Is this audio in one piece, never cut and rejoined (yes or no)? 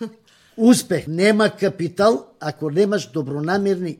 no